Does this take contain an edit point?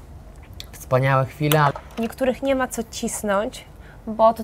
yes; 1 cut; at 1.7 s

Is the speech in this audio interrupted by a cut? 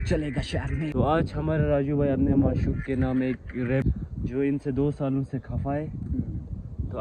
yes; 2 cuts; at 0.9 s, 3.8 s

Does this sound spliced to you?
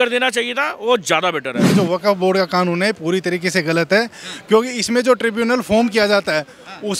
yes; 1 cut; at 1.6 s

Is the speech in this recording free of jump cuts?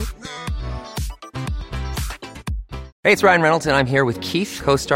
no; 1 cut; at 2.9 s

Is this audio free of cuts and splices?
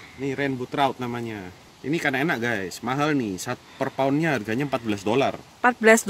no; 1 cut; at 1.6 s

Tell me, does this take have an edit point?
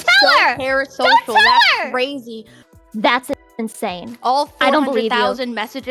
yes; 1 cut; at 2.6 s

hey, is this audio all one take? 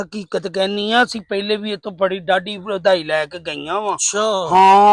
yes; 0 cuts

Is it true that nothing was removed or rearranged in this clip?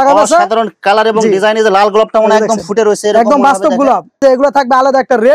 no; 1 cut; at 4.2 s

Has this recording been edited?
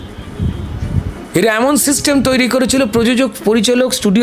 no; 0 cuts

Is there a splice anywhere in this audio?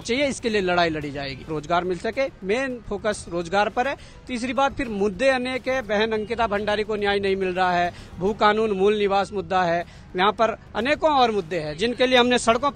yes; 1 cut; at 1.5 s

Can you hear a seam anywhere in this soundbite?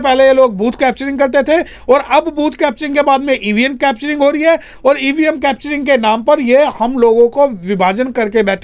no; 0 cuts

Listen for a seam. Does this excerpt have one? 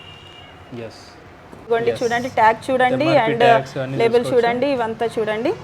yes; 1 cut; at 1.7 s

